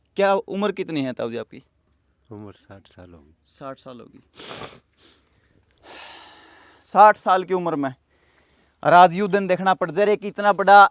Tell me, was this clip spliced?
no; 0 cuts

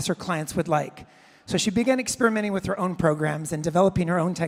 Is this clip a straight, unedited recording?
yes; 0 cuts

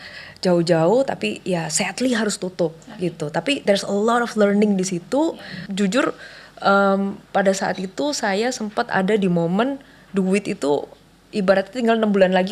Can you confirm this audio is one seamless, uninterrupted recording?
no; 1 cut; at 5.6 s

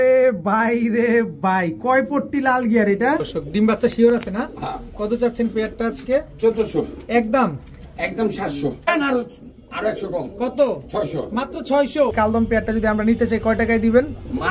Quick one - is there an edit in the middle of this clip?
yes; 3 cuts; at 3.3 s, 8.9 s, 12.1 s

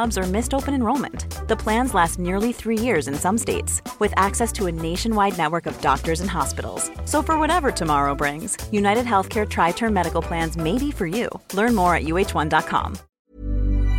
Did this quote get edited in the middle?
yes; 1 cut; at 13.0 s

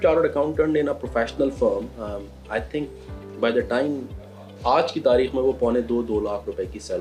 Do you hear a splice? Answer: no; 0 cuts

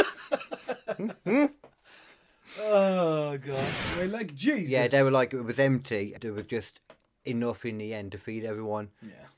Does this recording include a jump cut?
yes; 2 cuts; at 3.8 s, 6.1 s

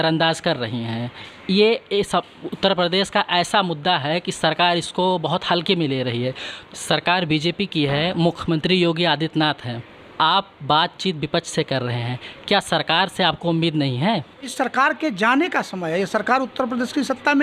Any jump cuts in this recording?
yes; 2 cuts; at 6.5 s, 14.5 s

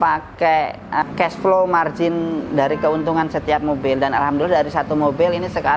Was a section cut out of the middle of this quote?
yes; 1 cut; at 1.0 s

